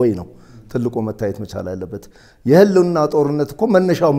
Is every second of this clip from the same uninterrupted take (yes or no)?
yes